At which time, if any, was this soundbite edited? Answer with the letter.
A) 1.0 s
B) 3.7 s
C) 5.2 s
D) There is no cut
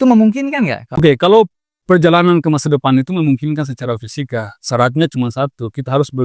A